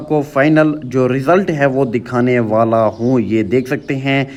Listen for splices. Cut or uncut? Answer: uncut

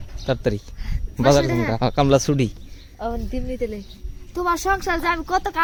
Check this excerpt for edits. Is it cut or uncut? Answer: uncut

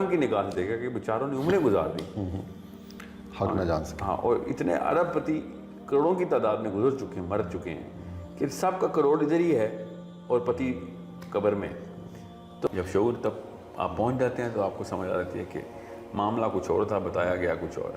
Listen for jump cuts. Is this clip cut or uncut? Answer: cut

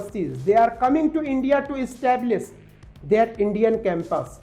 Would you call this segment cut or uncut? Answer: uncut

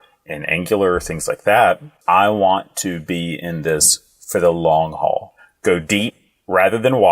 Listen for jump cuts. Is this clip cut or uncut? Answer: cut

